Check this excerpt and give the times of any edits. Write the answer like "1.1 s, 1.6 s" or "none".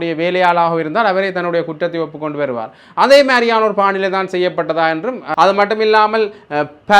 5.2 s